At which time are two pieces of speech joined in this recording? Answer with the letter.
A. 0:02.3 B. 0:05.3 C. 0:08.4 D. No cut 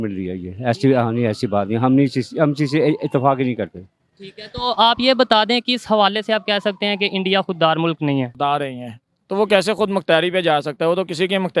C